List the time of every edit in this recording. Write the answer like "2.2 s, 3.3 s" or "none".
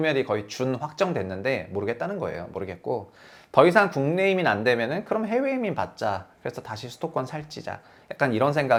none